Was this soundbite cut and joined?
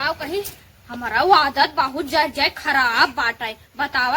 no; 0 cuts

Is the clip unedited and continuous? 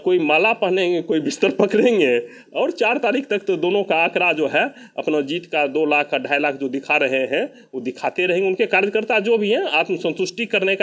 yes; 0 cuts

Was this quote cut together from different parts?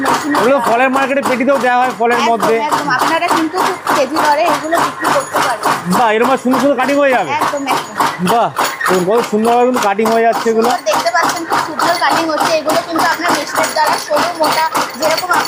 no; 0 cuts

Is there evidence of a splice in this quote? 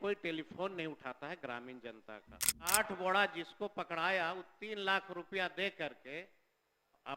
yes; 1 cut; at 2.7 s

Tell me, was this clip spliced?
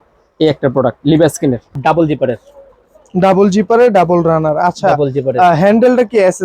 yes; 1 cut; at 1.7 s

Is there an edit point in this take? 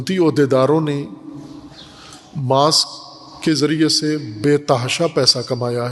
no; 0 cuts

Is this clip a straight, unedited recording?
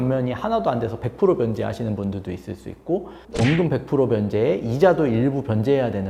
yes; 0 cuts

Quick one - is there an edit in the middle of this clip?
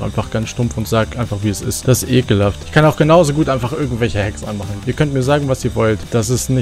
yes; 2 cuts; at 1.7 s, 4.6 s

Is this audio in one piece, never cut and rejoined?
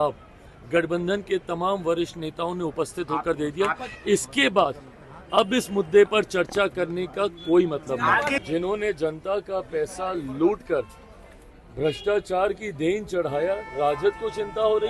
no; 1 cut; at 8.4 s

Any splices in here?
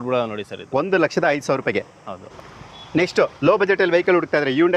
no; 0 cuts

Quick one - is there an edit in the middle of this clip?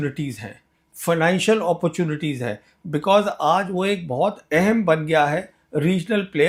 no; 0 cuts

